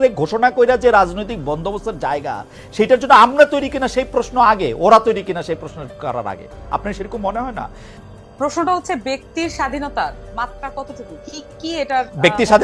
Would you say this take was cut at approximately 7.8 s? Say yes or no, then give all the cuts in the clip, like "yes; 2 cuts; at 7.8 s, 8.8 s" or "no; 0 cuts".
yes; 1 cut; at 7.8 s